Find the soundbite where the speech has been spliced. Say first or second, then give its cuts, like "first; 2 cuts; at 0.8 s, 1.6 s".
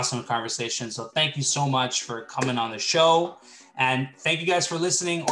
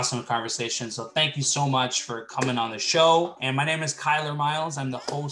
second; 1 cut; at 3.4 s